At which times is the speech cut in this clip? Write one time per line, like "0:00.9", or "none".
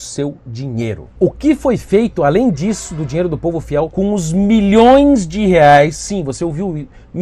0:01.0